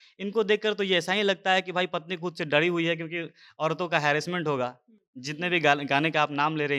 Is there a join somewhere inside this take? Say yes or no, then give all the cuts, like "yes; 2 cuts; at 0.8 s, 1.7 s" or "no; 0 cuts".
no; 0 cuts